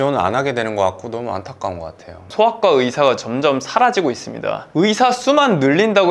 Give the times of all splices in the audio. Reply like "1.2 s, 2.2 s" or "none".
2.3 s